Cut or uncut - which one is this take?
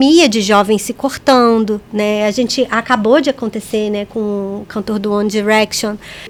uncut